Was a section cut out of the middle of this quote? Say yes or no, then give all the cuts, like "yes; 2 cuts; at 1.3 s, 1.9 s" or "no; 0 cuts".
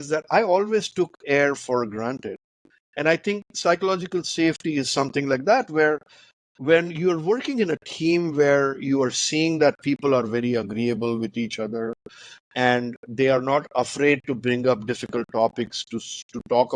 no; 0 cuts